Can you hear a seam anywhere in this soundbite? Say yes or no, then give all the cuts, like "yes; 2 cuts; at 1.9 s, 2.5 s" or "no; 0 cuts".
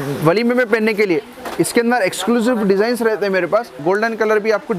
yes; 1 cut; at 3.8 s